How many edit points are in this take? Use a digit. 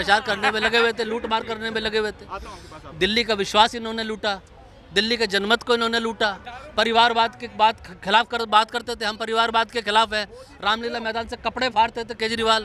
0